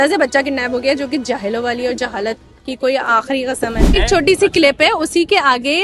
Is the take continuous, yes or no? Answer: yes